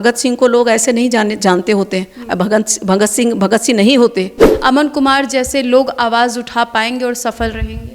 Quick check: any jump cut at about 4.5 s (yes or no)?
yes